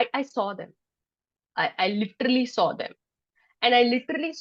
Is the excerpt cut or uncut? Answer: uncut